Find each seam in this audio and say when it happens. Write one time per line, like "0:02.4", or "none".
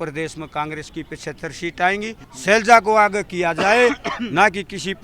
0:02.3